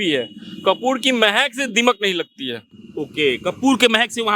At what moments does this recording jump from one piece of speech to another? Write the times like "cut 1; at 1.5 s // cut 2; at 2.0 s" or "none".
none